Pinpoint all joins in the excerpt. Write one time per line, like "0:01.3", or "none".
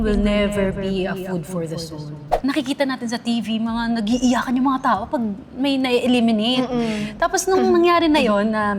0:02.3